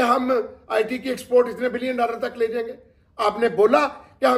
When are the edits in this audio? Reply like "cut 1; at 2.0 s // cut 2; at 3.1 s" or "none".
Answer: none

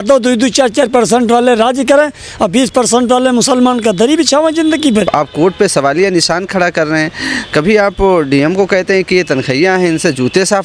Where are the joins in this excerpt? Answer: cut 1; at 5.1 s

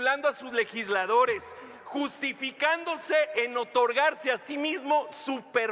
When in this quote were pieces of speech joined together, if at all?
none

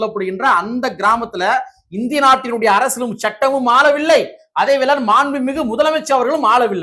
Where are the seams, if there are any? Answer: none

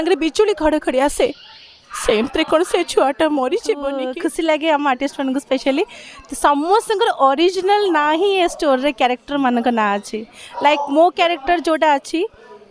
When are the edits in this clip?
cut 1; at 4.0 s

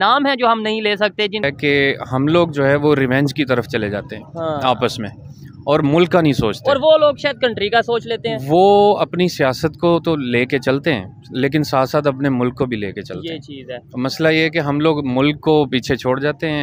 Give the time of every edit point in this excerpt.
cut 1; at 1.4 s

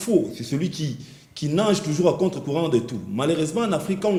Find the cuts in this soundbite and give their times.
none

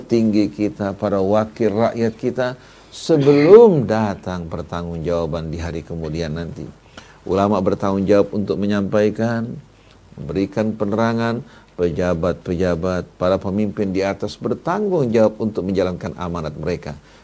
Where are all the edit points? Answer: none

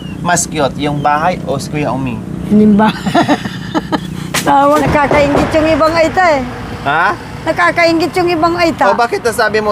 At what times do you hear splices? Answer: cut 1; at 4.7 s

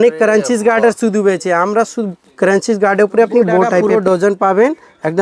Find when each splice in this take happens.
cut 1; at 3.8 s

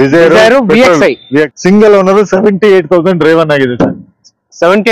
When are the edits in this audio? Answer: cut 1; at 1.5 s

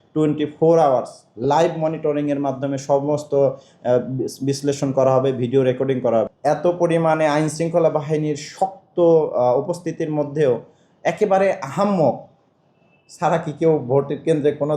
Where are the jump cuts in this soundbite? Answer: cut 1; at 6.3 s

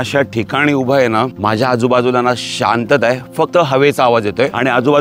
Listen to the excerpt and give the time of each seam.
none

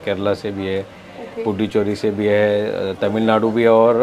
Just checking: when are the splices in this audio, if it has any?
none

